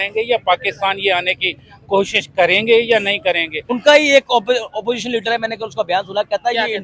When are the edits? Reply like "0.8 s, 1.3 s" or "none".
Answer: 3.6 s

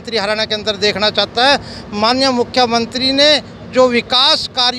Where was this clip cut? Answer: none

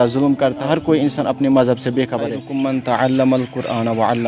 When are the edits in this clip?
2.4 s

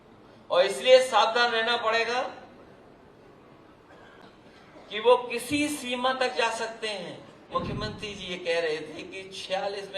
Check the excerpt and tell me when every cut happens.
7.5 s

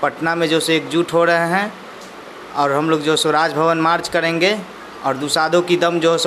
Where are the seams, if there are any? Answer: none

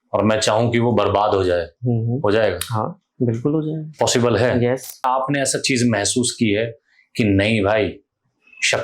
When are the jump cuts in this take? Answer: 5.0 s

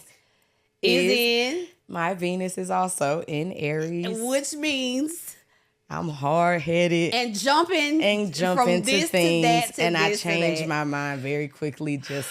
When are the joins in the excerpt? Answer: none

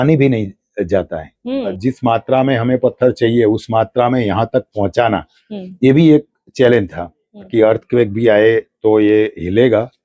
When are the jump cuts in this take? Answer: 1.8 s, 7.5 s

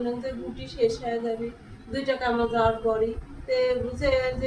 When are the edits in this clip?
3.3 s

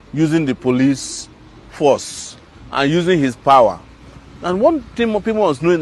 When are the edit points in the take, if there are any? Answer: none

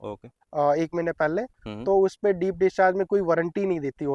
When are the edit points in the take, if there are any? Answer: none

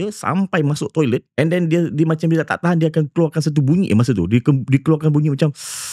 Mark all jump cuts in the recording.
1.3 s

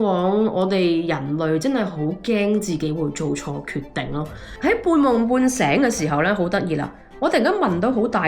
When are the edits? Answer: 4.4 s

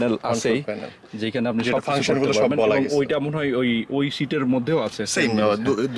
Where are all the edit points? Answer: none

